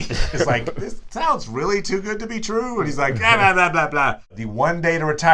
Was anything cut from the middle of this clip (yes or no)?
yes